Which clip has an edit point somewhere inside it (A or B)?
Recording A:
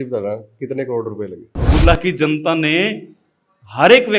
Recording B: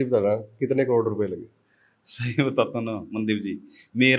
A